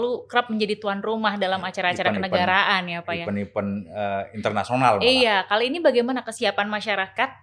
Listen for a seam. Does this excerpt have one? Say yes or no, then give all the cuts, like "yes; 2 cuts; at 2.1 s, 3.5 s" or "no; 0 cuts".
yes; 1 cut; at 6.4 s